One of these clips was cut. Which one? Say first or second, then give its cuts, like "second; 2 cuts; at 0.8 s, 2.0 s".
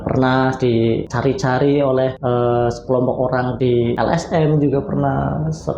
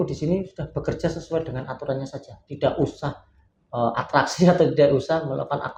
first; 3 cuts; at 1.1 s, 2.2 s, 3.8 s